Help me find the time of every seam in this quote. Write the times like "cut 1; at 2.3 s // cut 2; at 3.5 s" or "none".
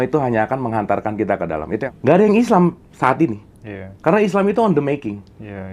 cut 1; at 1.8 s